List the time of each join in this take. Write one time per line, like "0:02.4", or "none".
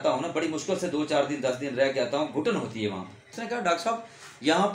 0:03.3

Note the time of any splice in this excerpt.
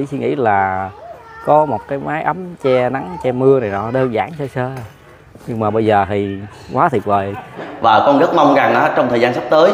0:07.5

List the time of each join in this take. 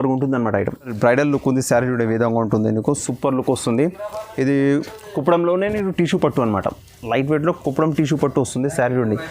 0:00.9

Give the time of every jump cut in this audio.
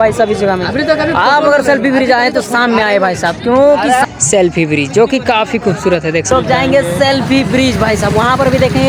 0:04.1
0:06.3

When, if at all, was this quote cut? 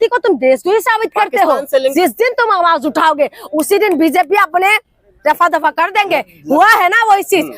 0:01.9

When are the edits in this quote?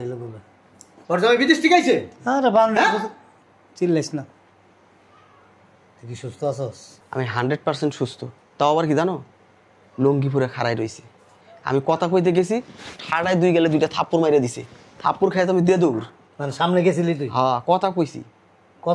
0:00.9
0:06.9

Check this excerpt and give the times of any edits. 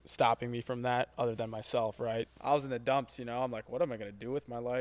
0:02.3

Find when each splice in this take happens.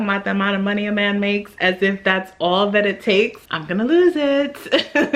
none

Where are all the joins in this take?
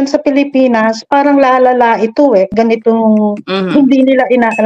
0:02.5

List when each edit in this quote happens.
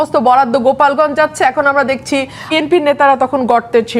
0:02.5

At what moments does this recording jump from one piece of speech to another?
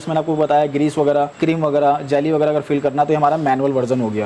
0:01.3

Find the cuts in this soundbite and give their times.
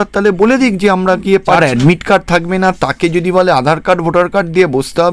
0:01.6

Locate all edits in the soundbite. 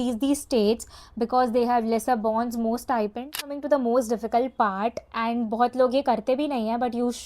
0:03.6

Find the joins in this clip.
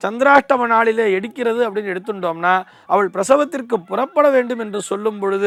none

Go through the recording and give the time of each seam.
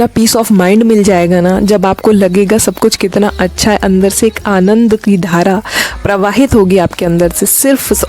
none

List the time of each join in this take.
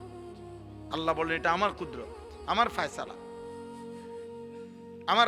0:00.9

